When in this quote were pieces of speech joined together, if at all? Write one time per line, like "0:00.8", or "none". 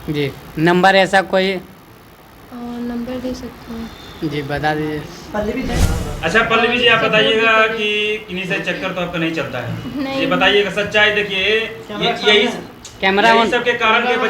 0:05.7